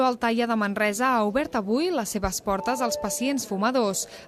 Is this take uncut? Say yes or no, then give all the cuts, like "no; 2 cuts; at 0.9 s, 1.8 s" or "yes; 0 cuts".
no; 1 cut; at 2.4 s